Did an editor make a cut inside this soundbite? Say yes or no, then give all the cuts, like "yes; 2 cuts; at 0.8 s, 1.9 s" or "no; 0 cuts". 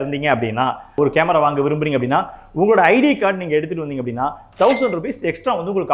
no; 0 cuts